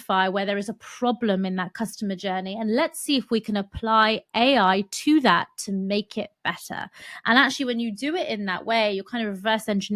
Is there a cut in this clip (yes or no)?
no